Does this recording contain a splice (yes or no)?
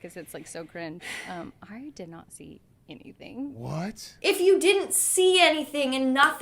yes